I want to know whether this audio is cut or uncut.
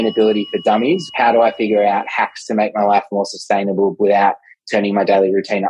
cut